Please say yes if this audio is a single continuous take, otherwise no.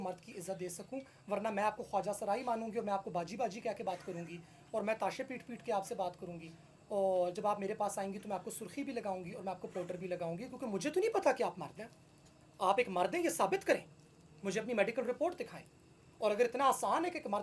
yes